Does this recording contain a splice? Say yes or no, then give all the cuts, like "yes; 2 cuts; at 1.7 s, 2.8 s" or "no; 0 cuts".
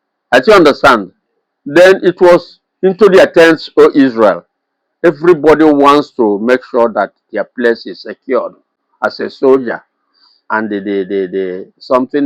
no; 0 cuts